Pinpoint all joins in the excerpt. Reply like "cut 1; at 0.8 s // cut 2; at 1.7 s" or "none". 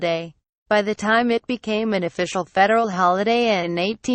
none